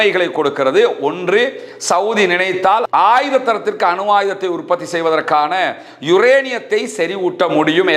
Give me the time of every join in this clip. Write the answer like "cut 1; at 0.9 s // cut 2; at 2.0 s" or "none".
none